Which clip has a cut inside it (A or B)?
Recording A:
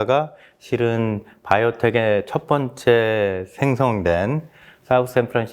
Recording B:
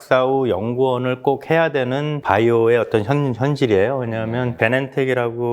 B